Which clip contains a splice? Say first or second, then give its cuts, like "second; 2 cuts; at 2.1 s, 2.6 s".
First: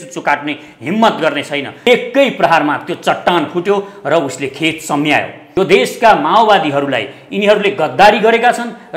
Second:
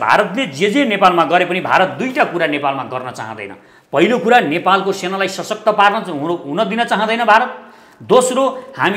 first; 2 cuts; at 1.7 s, 5.4 s